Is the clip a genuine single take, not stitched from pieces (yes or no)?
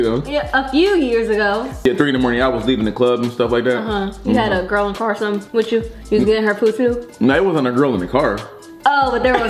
no